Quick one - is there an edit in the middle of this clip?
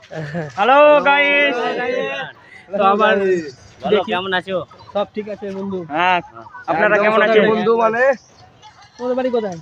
no; 0 cuts

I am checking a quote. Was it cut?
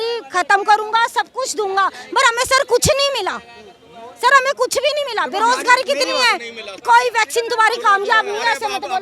yes; 1 cut; at 6.8 s

